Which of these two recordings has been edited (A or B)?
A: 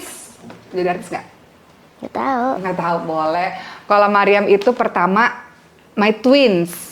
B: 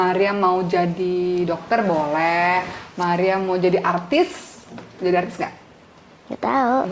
A